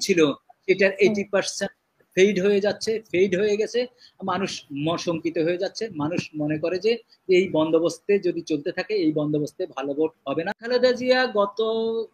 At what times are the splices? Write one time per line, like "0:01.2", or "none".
0:10.6